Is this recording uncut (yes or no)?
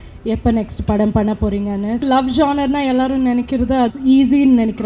no